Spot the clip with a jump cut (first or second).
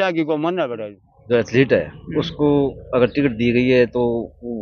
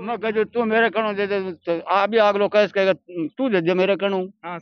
first